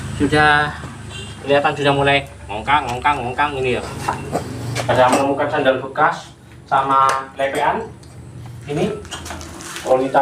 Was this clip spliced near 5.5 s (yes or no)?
no